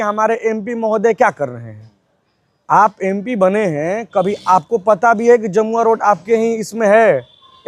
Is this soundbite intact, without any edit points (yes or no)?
yes